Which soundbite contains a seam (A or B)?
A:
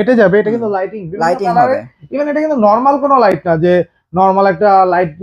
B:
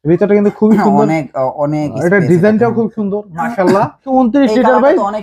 B